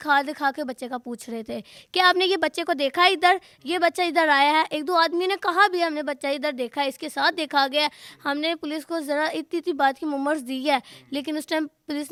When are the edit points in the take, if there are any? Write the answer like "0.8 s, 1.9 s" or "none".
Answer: none